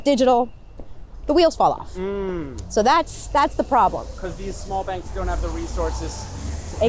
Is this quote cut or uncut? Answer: uncut